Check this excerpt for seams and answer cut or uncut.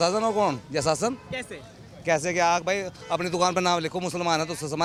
uncut